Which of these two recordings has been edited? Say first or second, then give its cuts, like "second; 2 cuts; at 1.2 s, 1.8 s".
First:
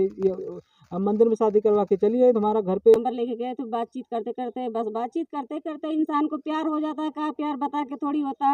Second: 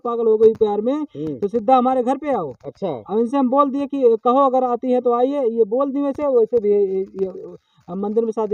first; 1 cut; at 2.9 s